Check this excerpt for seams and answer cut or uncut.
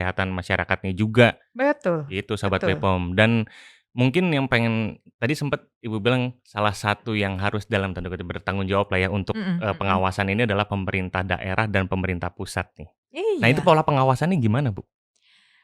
uncut